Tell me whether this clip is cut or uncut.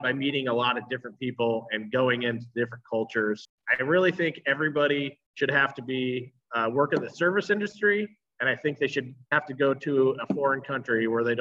cut